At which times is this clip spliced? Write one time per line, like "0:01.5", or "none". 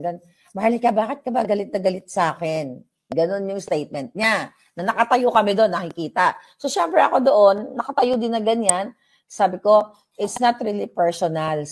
none